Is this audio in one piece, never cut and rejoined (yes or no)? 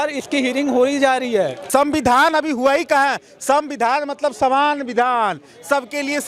no